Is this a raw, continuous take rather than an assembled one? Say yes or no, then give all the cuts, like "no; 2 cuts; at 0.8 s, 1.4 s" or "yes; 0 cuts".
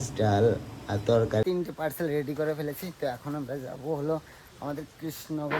no; 1 cut; at 1.4 s